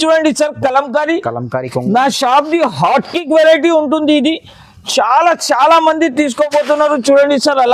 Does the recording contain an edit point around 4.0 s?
no; 0 cuts

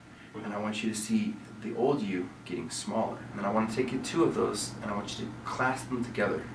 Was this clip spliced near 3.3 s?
yes; 1 cut; at 3.3 s

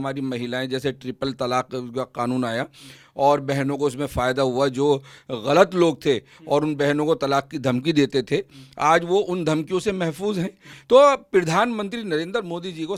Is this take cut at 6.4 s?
no; 0 cuts

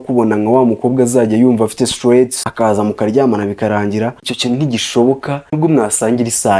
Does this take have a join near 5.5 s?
yes; 3 cuts; at 2.4 s, 4.3 s, 5.5 s

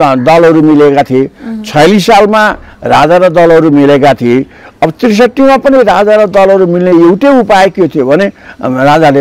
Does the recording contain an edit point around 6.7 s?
no; 0 cuts

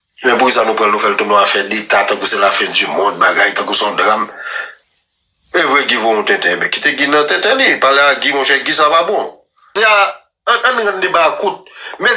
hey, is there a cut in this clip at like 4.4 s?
no; 1 cut; at 9.7 s

